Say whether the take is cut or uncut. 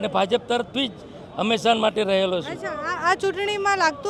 uncut